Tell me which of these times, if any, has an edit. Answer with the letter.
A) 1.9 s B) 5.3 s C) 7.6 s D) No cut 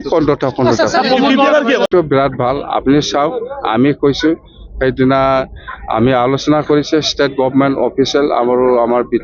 A